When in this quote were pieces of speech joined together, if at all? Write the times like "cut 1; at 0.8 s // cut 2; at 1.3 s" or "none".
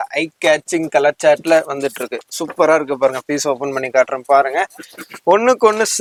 none